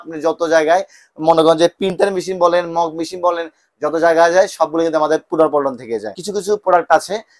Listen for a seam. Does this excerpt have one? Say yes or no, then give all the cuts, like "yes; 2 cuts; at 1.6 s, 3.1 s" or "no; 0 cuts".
yes; 1 cut; at 6.1 s